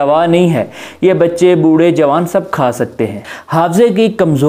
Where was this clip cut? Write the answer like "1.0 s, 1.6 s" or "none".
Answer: 3.2 s